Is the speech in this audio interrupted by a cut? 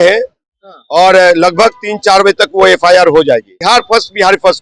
yes; 1 cut; at 3.5 s

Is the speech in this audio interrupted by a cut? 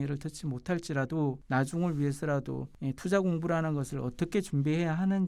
no; 0 cuts

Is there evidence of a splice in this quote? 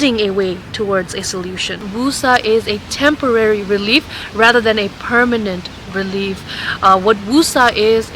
yes; 1 cut; at 1.9 s

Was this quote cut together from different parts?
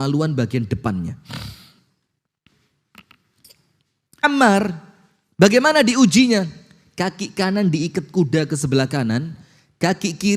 yes; 1 cut; at 4.2 s

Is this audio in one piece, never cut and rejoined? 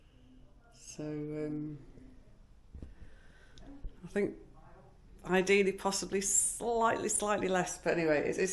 yes; 0 cuts

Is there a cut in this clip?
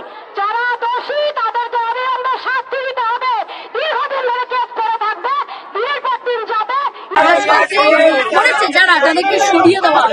yes; 1 cut; at 7.1 s

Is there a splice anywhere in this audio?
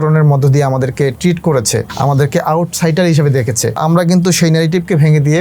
yes; 2 cuts; at 1.9 s, 3.8 s

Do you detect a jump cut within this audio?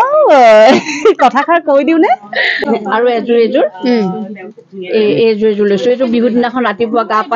yes; 1 cut; at 2.6 s

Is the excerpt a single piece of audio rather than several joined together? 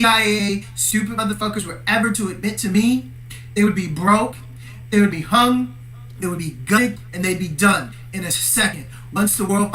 no; 1 cut; at 5.6 s

